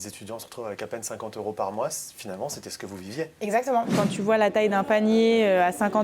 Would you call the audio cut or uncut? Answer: cut